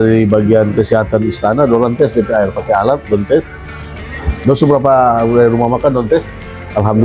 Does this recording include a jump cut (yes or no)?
no